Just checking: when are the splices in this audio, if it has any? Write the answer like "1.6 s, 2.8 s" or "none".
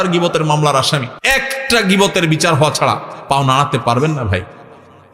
1.1 s